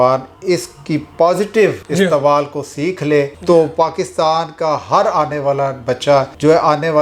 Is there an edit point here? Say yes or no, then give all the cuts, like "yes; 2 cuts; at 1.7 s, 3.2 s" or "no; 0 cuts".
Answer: no; 0 cuts